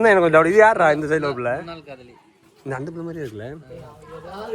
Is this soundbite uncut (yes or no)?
yes